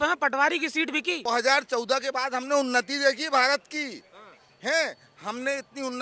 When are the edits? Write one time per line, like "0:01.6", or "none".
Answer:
0:01.3

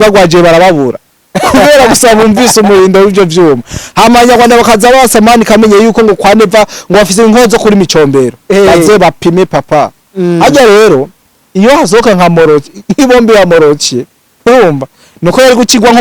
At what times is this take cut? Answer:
none

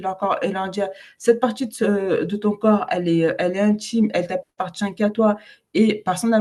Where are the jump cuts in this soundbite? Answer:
none

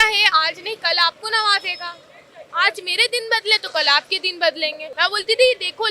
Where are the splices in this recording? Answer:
0:04.9

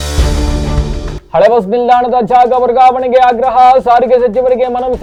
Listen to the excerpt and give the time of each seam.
none

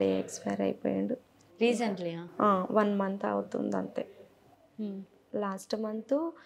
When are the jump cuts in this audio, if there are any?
none

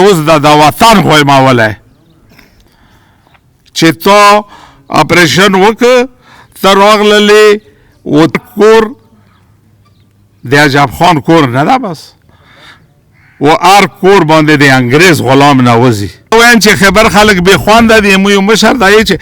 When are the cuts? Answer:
0:08.4
0:16.3

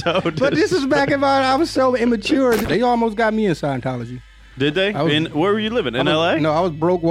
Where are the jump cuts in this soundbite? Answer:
0:02.6

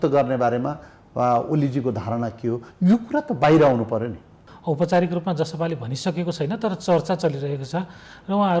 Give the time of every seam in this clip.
0:04.5

